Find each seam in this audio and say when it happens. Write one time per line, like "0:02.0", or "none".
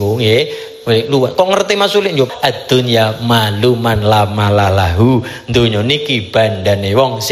0:02.3